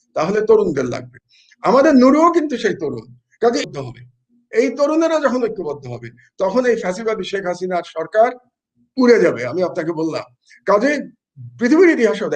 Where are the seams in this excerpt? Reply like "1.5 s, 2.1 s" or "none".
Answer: 3.7 s